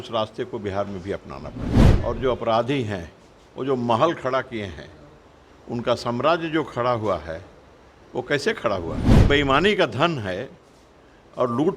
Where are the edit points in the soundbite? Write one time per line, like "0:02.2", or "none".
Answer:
0:01.8
0:09.0